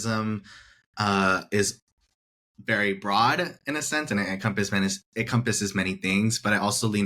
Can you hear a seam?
no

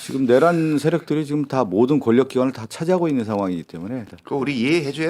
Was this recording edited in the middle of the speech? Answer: yes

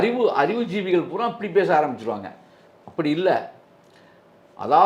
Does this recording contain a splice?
no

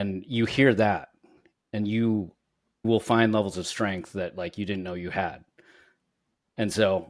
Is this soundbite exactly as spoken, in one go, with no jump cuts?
no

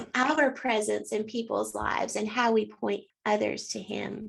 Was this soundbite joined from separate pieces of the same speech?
yes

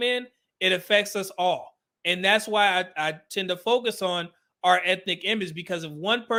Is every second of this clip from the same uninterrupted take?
yes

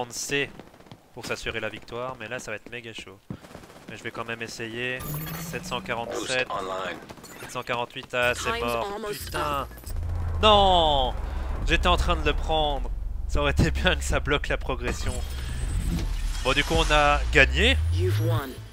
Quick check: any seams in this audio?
yes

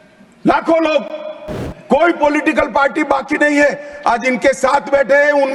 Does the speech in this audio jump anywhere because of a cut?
no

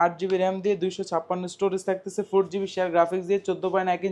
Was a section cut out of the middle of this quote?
no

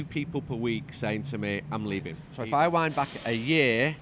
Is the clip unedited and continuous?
no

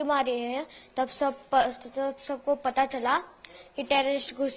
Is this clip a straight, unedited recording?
yes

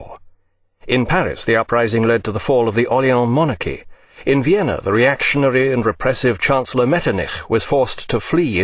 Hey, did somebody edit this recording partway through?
yes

